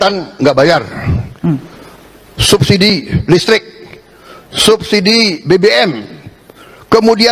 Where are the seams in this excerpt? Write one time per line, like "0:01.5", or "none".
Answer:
none